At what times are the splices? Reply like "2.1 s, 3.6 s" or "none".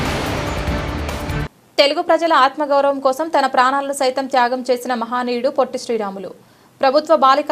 1.4 s